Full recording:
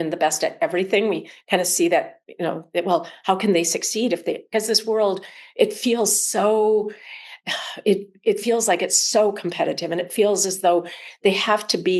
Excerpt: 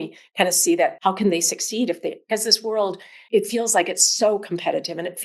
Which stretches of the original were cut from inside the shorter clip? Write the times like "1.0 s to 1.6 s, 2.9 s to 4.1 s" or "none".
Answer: 2.1 s to 3.2 s, 5.4 s to 8.1 s